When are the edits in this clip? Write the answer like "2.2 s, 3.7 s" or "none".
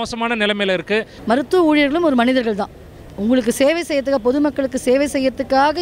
1.1 s